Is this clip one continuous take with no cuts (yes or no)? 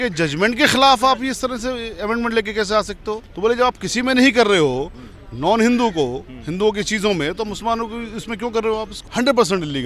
no